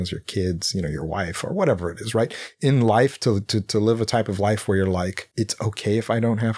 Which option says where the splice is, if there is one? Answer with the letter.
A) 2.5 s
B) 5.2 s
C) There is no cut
B